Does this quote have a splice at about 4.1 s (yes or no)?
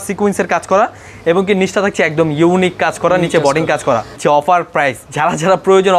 yes